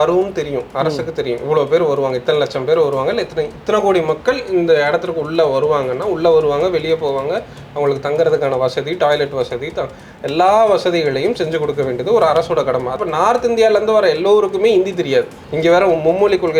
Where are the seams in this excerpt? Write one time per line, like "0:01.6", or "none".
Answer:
0:13.0